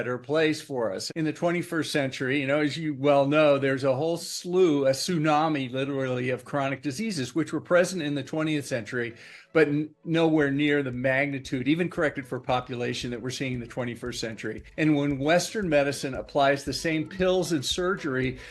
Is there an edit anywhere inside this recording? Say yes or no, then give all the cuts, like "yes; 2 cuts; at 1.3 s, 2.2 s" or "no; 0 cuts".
yes; 2 cuts; at 1.0 s, 14.6 s